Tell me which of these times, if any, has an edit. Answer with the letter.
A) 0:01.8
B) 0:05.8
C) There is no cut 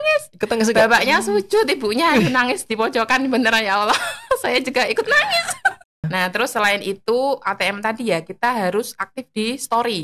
B